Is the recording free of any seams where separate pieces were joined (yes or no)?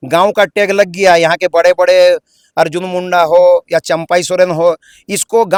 yes